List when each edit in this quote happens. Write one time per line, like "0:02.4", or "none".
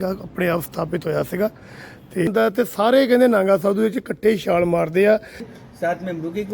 0:02.3
0:05.5